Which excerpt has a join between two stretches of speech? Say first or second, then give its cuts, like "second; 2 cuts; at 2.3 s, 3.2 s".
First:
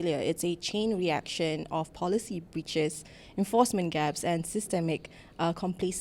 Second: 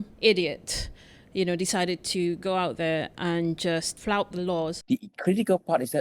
second; 2 cuts; at 3.9 s, 4.8 s